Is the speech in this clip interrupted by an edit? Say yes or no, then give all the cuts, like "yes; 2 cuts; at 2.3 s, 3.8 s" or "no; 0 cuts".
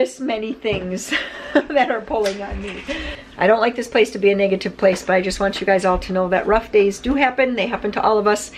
no; 0 cuts